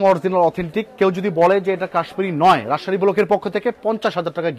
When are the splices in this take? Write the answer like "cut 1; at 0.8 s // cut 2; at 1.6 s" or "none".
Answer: none